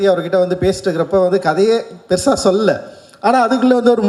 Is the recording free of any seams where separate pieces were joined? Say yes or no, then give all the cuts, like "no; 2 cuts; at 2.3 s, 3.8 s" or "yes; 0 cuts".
yes; 0 cuts